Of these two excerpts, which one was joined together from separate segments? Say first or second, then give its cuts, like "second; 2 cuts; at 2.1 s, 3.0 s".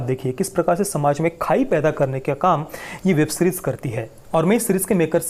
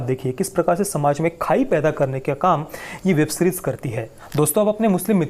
second; 1 cut; at 4.1 s